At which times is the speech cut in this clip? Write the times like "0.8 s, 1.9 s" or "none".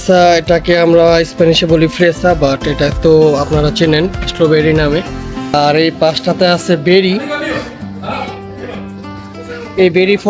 5.4 s